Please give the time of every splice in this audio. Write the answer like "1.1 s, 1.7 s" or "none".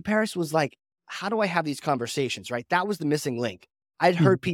none